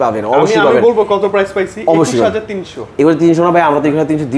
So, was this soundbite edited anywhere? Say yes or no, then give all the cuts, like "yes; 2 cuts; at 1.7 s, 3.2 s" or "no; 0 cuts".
no; 0 cuts